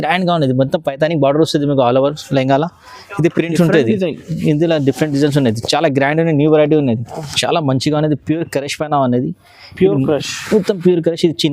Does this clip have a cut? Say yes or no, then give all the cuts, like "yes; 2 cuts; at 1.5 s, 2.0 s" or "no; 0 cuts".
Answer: yes; 1 cut; at 7.3 s